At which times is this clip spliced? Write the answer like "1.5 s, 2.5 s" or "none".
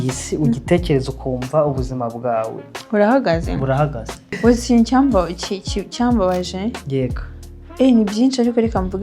4.3 s